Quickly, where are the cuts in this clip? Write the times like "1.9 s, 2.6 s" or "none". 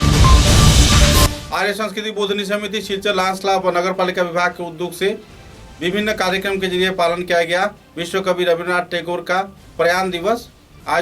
none